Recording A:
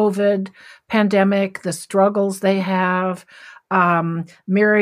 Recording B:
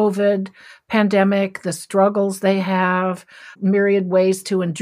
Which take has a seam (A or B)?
B